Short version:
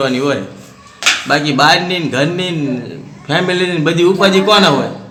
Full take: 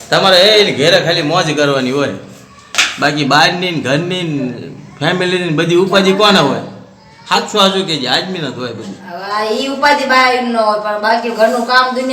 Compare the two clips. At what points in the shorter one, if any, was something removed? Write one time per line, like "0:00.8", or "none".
none